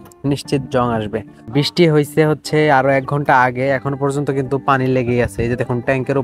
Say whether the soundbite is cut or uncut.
cut